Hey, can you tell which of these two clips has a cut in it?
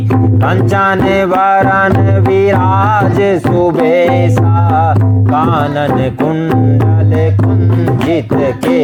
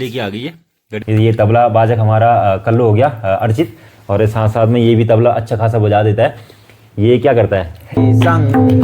second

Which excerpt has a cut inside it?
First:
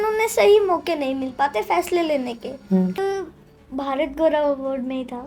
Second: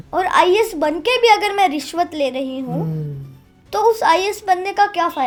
first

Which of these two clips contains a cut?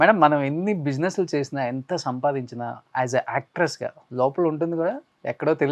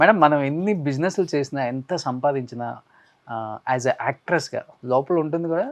first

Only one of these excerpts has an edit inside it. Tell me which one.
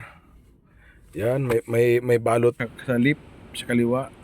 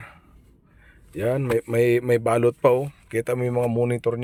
first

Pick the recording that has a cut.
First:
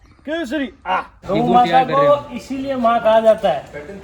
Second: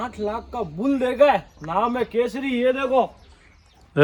first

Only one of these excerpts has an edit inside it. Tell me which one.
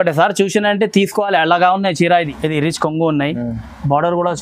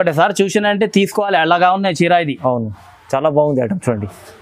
first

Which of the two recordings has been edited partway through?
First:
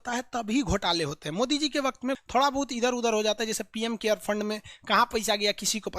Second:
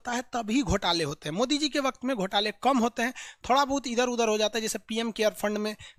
first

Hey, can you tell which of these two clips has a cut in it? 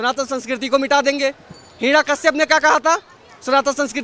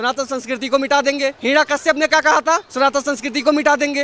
second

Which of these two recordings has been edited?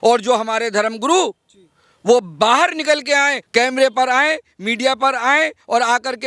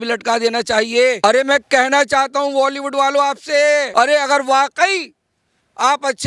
second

